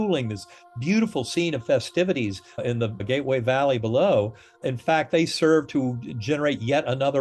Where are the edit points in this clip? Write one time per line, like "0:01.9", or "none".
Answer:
0:02.7
0:04.6